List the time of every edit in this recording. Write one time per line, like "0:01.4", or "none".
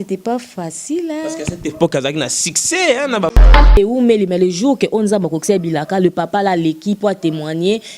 0:03.4